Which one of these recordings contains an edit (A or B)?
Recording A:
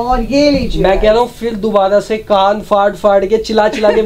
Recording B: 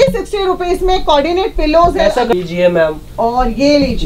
B